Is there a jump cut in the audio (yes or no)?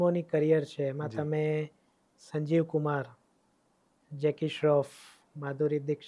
no